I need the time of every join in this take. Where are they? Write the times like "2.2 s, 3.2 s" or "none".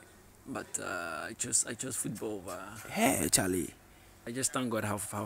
4.1 s

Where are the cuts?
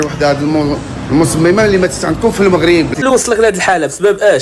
2.9 s

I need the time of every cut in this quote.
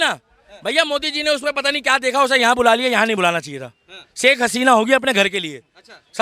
none

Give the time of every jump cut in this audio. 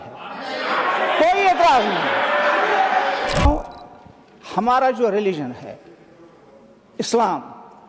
3.5 s

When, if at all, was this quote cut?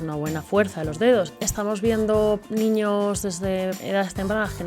1.4 s, 2.5 s, 3.8 s

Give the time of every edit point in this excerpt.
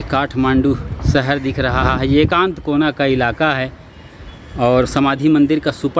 none

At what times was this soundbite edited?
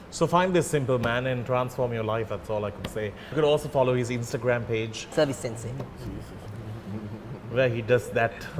3.3 s, 5.2 s

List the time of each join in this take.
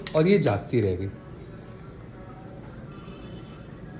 none

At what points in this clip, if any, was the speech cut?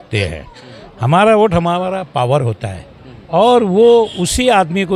none

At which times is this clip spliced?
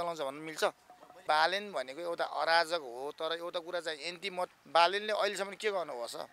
1.2 s, 4.5 s

